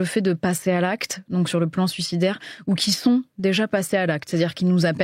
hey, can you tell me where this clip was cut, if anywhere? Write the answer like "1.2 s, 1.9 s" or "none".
none